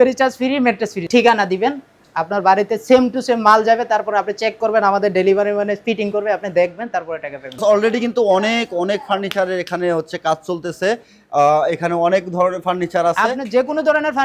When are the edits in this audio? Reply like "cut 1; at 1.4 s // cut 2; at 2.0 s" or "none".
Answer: cut 1; at 1.0 s // cut 2; at 7.6 s